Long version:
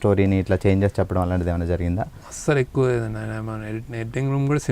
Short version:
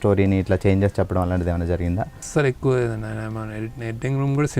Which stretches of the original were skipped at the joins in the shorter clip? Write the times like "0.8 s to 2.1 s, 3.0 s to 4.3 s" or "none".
2.1 s to 2.3 s